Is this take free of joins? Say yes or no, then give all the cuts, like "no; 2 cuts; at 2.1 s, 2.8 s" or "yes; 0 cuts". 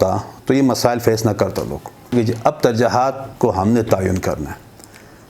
no; 1 cut; at 2.1 s